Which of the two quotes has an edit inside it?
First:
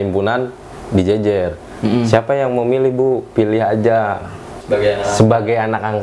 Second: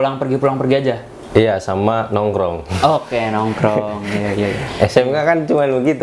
first; 1 cut; at 4.5 s

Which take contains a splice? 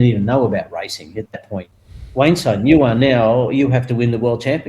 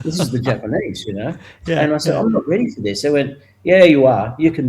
first; 1 cut; at 1.7 s

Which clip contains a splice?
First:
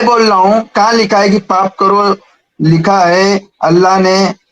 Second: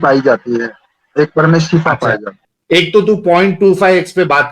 second; 1 cut; at 2.3 s

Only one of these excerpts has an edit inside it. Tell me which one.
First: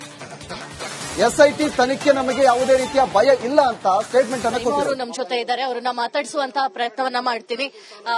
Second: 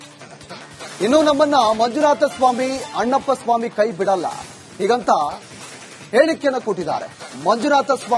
first; 1 cut; at 1.0 s

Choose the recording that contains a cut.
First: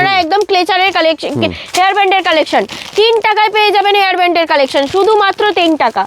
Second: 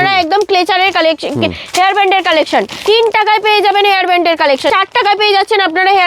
second; 2 cuts; at 2.7 s, 4.7 s

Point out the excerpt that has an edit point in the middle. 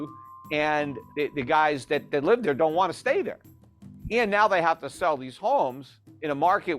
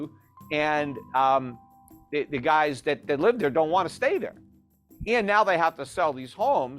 first; 1 cut; at 1.0 s

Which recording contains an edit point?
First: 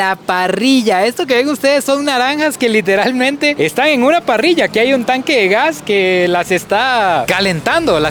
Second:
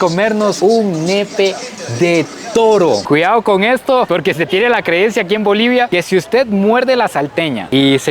second; 1 cut; at 3.0 s

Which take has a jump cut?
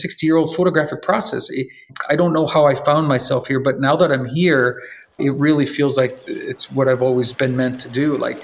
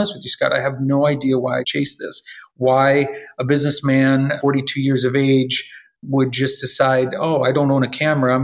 second; 2 cuts; at 1.7 s, 4.4 s

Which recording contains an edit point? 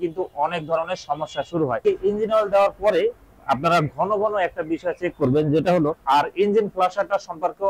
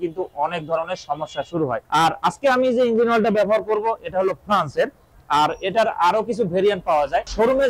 first; 2 cuts; at 1.8 s, 6.0 s

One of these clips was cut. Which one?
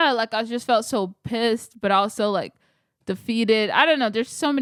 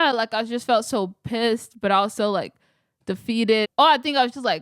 second; 1 cut; at 3.7 s

